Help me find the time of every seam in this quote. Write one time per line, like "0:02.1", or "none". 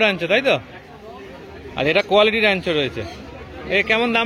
none